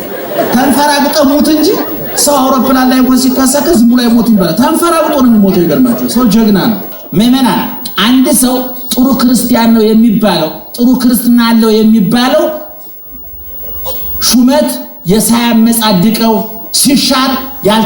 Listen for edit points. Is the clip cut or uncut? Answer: cut